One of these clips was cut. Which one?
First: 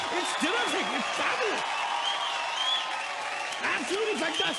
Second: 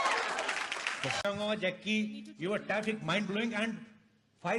second; 1 cut; at 1.2 s

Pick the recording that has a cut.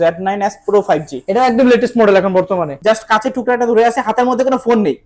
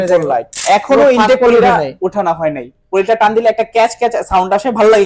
first; 1 cut; at 2.7 s

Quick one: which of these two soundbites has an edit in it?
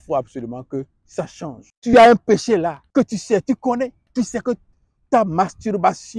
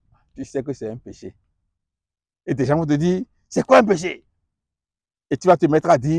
first; 3 cuts; at 1.7 s, 2.8 s, 4.0 s

